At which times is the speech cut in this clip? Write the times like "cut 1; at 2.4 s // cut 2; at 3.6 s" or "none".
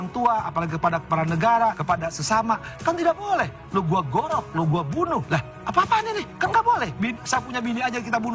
cut 1; at 1.8 s // cut 2; at 5.3 s // cut 3; at 6.3 s